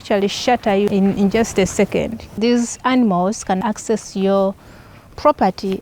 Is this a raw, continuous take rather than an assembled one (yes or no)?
no